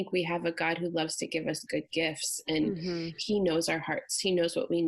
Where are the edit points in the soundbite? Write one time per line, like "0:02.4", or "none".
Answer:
none